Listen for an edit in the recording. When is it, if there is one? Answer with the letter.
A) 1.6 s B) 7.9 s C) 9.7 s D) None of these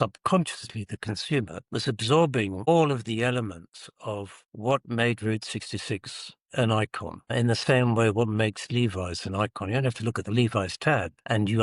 A